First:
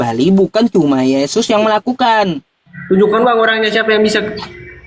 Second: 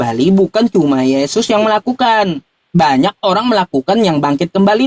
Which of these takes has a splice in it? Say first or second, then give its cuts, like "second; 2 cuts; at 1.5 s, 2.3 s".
first; 1 cut; at 2.5 s